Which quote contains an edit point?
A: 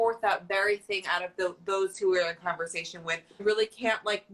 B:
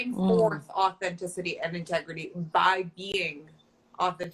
A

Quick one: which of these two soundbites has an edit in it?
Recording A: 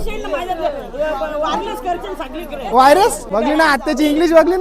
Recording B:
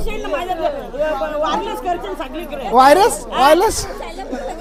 A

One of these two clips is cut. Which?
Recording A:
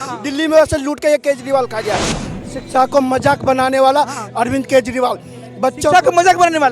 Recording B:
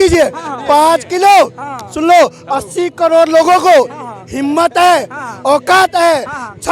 A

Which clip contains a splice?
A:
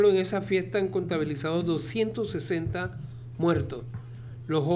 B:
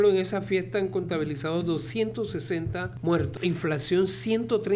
B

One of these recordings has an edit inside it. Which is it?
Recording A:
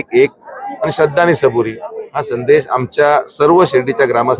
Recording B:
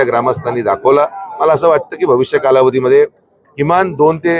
B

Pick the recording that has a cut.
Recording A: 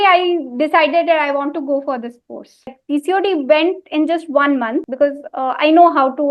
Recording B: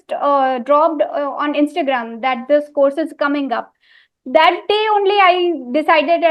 A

